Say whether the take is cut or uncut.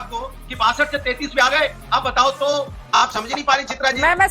cut